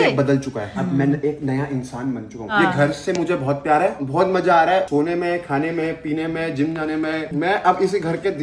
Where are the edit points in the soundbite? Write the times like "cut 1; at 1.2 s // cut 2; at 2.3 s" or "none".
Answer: cut 1; at 2.5 s